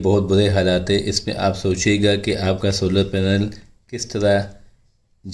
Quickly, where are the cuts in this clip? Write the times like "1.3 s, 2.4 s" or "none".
none